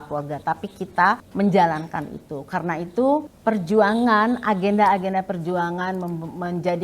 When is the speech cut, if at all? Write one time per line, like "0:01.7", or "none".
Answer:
0:01.3
0:03.3

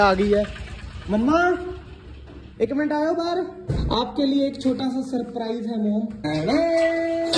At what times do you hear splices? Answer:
0:03.6
0:06.2

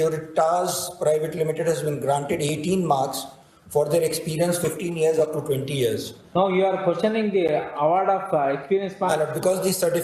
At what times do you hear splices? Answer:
none

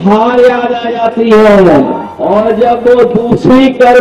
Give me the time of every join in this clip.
0:02.1

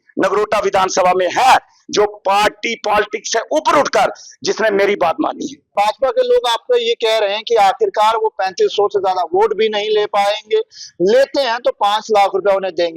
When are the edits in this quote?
0:05.7

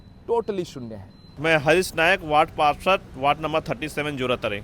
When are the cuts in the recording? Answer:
none

